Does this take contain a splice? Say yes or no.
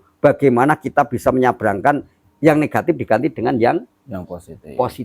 yes